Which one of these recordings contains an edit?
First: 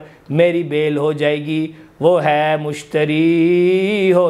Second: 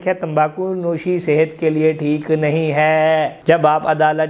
second; 1 cut; at 3.3 s

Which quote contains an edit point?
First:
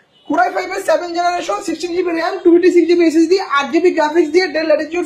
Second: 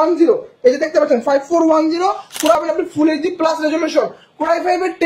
second; 1 cut; at 2.5 s

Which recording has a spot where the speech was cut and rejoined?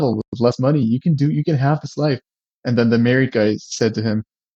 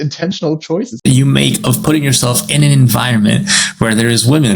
second; 1 cut; at 0.9 s

